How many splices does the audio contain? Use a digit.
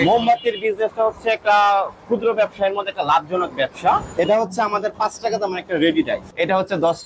2